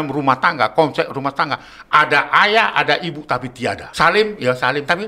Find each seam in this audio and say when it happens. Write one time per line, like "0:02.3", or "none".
0:03.9